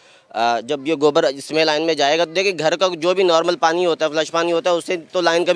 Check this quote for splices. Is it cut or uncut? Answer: uncut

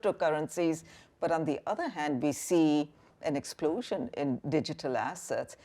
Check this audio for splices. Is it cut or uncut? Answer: cut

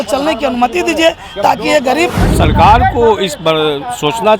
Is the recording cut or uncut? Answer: cut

